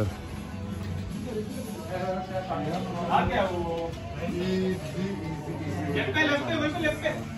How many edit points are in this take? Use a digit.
0